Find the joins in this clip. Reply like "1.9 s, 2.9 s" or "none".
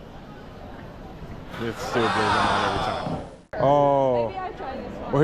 3.5 s